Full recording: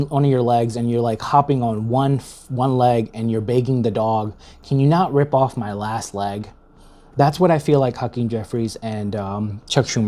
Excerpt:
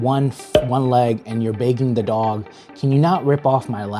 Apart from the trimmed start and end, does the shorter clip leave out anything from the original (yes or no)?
no